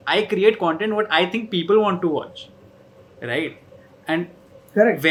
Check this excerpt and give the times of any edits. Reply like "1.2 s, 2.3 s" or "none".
none